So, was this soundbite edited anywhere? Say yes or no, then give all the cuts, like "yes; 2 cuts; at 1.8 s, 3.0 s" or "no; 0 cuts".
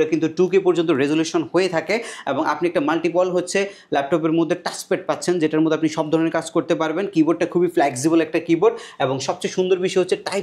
no; 0 cuts